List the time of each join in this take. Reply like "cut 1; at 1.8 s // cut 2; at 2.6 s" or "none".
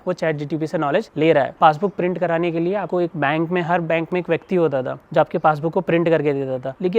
cut 1; at 1.6 s // cut 2; at 3.0 s